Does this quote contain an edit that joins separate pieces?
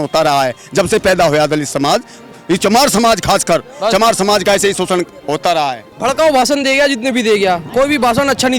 yes; 1 cut; at 5.9 s

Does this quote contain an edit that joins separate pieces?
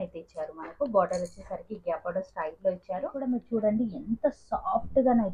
yes; 1 cut; at 3.2 s

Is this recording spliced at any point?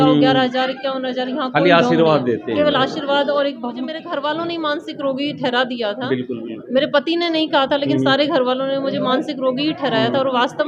yes; 1 cut; at 4.0 s

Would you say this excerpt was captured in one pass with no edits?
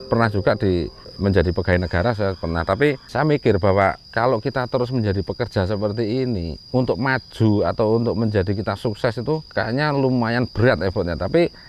no; 4 cuts; at 1.1 s, 4.0 s, 6.6 s, 9.5 s

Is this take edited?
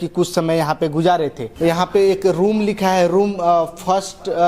yes; 1 cut; at 1.4 s

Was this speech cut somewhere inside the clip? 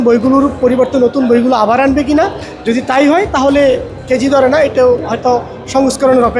no; 0 cuts

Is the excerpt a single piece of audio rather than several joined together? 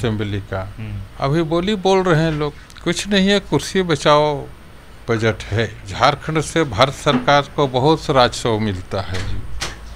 no; 2 cuts; at 2.7 s, 5.8 s

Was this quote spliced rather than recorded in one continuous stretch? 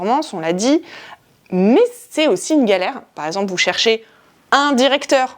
yes; 1 cut; at 3.1 s

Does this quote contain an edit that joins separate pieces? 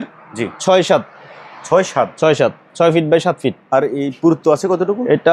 no; 0 cuts

